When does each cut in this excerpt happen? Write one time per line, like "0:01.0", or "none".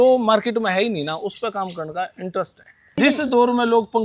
0:03.0

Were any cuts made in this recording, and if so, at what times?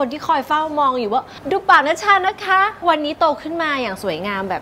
0:01.4
0:02.8

